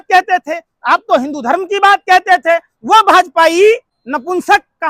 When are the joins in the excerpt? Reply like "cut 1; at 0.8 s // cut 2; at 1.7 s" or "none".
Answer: cut 1; at 3.9 s